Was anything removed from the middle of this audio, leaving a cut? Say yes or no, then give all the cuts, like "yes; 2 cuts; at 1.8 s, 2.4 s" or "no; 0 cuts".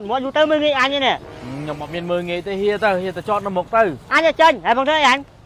no; 0 cuts